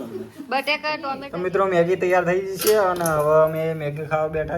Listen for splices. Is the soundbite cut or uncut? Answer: cut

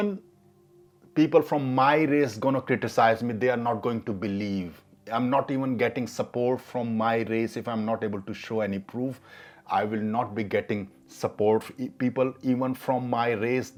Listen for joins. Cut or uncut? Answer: uncut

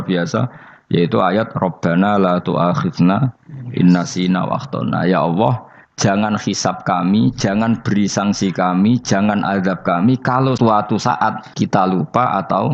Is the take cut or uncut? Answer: cut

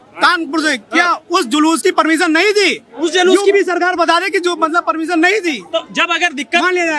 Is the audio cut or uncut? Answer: uncut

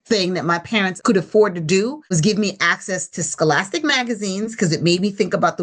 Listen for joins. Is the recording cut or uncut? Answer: cut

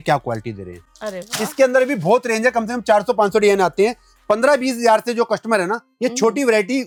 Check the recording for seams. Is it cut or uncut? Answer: uncut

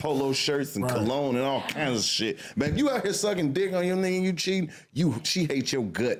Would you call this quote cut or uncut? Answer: uncut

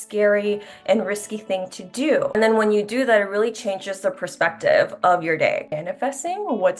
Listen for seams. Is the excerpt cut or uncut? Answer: cut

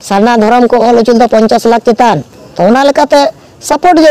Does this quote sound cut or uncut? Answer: cut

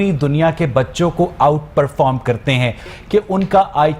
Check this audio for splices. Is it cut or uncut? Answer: cut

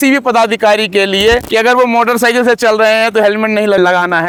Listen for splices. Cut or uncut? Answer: uncut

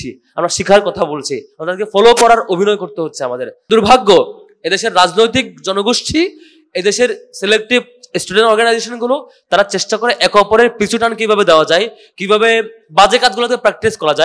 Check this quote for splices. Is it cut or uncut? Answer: cut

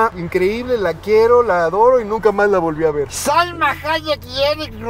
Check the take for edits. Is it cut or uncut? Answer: uncut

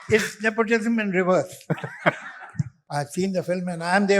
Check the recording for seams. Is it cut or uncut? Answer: cut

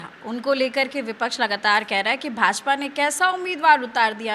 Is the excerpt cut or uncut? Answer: uncut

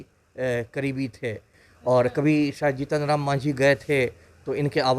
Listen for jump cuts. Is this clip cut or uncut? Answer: uncut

